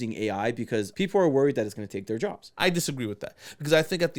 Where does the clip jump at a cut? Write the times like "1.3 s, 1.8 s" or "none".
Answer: 0.9 s, 2.4 s

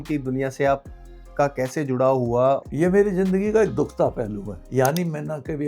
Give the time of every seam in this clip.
2.7 s

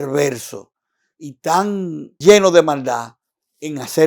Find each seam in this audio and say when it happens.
2.1 s

